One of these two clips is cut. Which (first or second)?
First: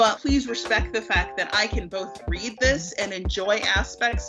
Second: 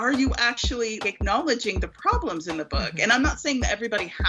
second